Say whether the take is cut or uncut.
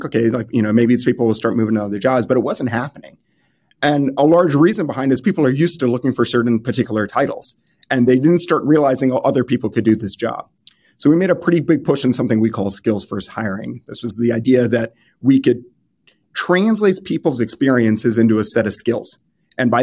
uncut